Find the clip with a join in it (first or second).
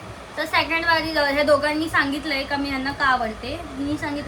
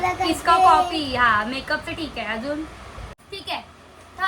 second